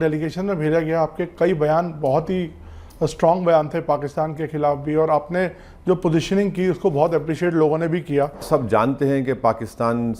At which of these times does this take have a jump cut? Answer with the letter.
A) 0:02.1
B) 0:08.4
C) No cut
B